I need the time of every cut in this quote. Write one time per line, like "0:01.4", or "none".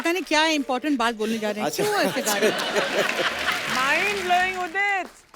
0:03.7

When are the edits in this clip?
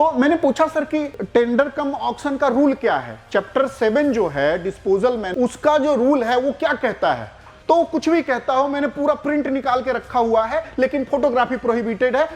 0:01.2
0:05.3

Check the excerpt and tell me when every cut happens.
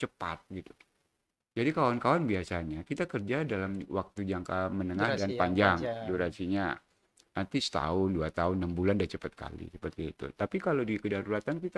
none

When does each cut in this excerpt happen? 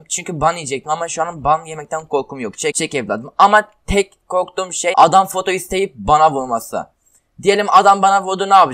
0:02.8
0:04.9

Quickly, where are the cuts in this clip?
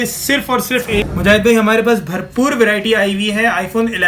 0:01.0

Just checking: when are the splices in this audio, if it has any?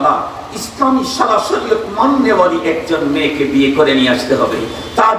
none

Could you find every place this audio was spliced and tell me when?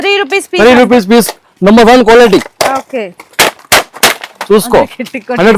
none

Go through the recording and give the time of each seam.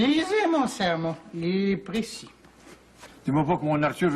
0:03.0

